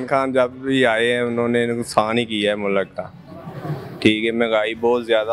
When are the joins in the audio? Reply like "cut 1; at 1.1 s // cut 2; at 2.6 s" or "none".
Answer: none